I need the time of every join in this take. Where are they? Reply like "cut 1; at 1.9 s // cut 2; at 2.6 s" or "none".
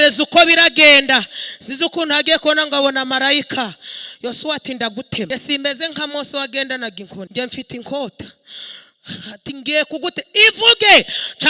cut 1; at 5.3 s // cut 2; at 7.3 s